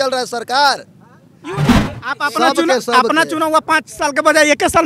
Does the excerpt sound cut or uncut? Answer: cut